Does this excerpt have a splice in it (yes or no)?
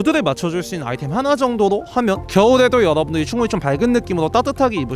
no